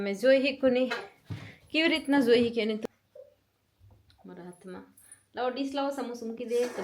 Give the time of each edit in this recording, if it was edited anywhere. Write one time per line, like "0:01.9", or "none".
0:02.8